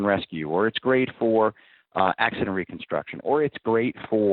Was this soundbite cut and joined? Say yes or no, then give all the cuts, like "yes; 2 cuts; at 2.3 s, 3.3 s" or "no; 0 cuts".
no; 0 cuts